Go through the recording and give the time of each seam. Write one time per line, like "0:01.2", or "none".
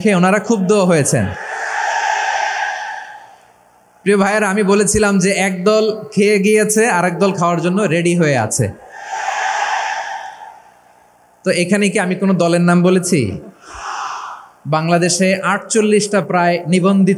none